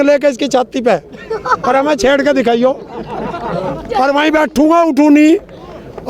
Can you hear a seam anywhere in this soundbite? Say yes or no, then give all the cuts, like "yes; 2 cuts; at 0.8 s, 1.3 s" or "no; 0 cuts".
no; 0 cuts